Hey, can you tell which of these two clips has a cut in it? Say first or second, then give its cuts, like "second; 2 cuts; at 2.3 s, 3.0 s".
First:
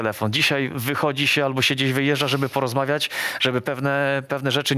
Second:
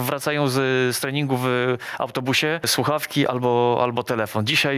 second; 1 cut; at 2.7 s